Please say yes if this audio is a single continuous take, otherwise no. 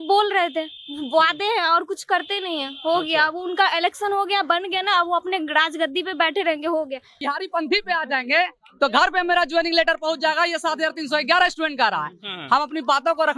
no